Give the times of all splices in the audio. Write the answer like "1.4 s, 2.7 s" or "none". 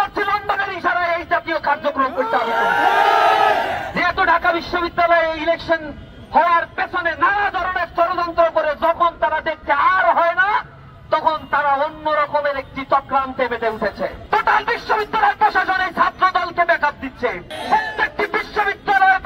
14.2 s, 17.5 s